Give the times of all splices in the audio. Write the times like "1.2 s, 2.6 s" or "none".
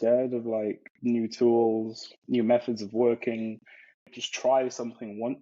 0.9 s, 2.1 s, 4.2 s